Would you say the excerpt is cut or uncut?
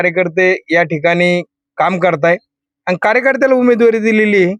uncut